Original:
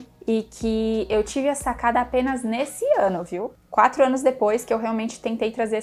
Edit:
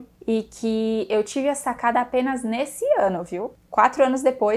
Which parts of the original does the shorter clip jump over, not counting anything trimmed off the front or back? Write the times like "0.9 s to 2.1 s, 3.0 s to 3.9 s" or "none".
none